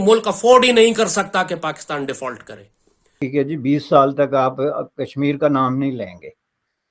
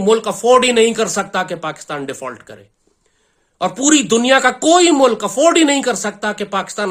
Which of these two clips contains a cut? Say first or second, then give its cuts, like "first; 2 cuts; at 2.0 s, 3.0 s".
first; 1 cut; at 3.2 s